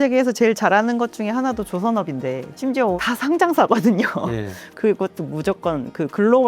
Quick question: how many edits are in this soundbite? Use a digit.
1